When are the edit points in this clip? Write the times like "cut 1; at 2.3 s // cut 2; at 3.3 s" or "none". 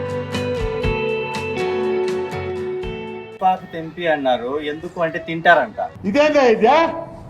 cut 1; at 3.3 s